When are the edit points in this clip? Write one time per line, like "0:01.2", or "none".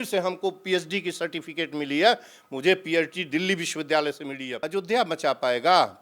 0:04.5